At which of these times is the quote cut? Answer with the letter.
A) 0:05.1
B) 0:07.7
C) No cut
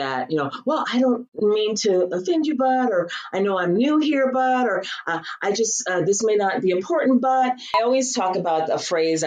B